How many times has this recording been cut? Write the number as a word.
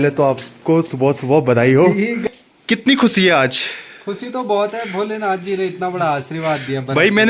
one